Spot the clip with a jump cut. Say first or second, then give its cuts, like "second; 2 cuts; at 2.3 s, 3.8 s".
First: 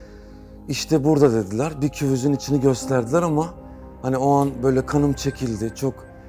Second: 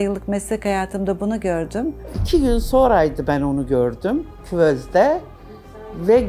second; 2 cuts; at 2.1 s, 4.4 s